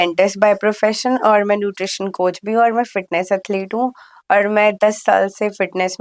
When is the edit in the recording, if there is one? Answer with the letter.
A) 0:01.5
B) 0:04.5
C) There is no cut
C